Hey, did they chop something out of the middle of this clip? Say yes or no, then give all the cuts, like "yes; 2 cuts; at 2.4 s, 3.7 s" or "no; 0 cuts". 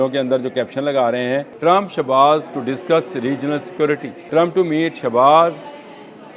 yes; 2 cuts; at 1.5 s, 4.1 s